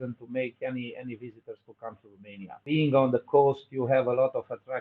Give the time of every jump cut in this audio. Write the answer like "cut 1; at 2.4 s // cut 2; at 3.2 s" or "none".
cut 1; at 2.7 s